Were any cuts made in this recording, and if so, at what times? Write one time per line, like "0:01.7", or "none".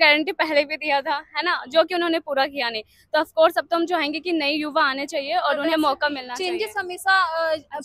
none